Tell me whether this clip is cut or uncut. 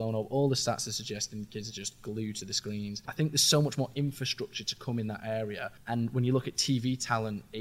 cut